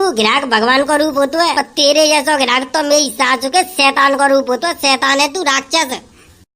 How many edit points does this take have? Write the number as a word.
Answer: one